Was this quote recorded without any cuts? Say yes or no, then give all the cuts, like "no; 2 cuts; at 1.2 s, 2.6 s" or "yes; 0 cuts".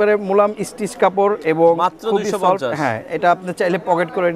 yes; 0 cuts